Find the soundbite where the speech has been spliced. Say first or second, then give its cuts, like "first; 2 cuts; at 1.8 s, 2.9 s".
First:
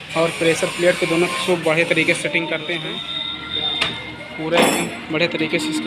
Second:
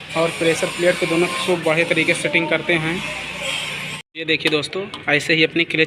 first; 1 cut; at 3.0 s